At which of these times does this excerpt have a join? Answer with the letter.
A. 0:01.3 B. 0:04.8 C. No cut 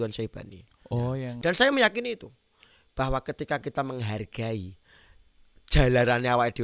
A